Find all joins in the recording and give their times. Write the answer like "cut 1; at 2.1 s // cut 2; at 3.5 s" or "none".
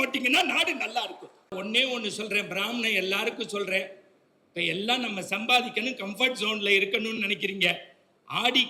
cut 1; at 1.5 s